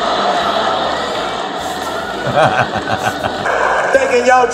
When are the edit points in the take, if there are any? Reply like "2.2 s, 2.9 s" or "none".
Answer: 3.4 s